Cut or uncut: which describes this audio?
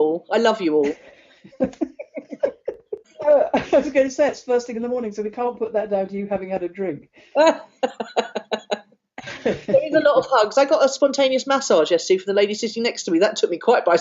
cut